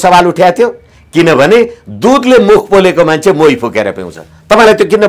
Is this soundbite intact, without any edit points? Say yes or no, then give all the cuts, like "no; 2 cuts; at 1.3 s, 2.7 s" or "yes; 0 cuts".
yes; 0 cuts